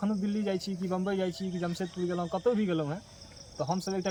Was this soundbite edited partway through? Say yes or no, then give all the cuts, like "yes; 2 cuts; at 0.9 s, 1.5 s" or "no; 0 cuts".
no; 0 cuts